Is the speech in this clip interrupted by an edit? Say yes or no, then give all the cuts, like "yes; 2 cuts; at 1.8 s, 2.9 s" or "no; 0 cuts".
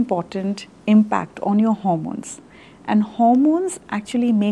no; 0 cuts